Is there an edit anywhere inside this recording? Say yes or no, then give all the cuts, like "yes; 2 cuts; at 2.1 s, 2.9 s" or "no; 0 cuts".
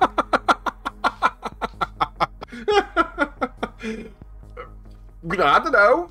yes; 1 cut; at 2.4 s